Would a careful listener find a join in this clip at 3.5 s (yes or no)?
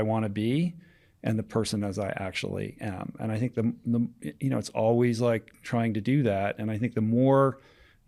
no